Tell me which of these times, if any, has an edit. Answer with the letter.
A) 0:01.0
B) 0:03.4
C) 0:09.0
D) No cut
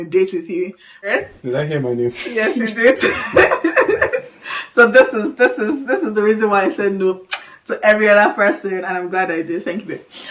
A